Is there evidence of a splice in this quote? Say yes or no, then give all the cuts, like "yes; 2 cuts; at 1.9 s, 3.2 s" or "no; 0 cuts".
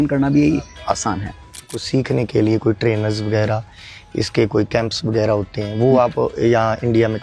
yes; 1 cut; at 1.7 s